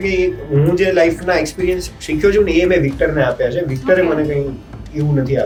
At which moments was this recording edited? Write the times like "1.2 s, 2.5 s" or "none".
none